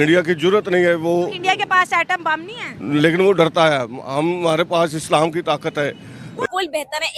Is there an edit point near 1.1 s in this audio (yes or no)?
no